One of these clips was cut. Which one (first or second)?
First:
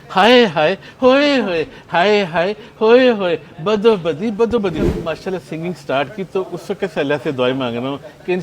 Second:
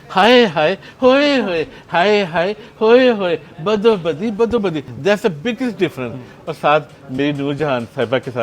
first